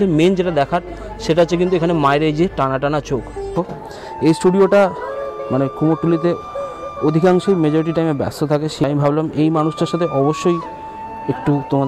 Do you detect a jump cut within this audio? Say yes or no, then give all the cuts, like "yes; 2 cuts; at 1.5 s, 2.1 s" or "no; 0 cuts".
yes; 2 cuts; at 3.5 s, 8.8 s